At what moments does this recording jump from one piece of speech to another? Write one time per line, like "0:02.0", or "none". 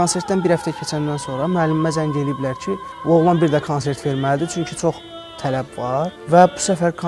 0:02.9
0:06.2